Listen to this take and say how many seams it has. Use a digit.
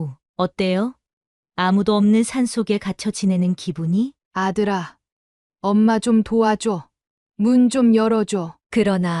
1